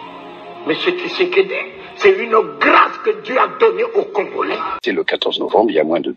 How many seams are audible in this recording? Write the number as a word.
one